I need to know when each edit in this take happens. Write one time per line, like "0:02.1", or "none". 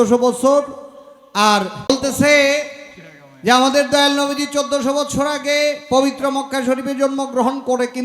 0:01.9